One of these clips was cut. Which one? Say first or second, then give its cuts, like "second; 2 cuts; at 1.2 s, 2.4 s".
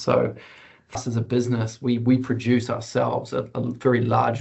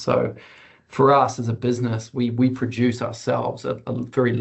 first; 1 cut; at 1.0 s